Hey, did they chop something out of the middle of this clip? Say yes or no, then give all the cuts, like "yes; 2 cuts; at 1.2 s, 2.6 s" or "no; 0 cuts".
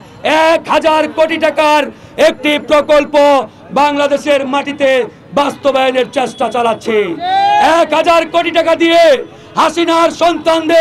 no; 0 cuts